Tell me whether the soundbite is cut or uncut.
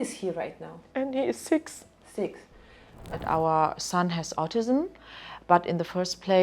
cut